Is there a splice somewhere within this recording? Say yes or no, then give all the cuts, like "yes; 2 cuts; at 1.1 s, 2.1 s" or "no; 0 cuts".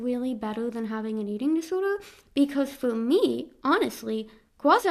no; 0 cuts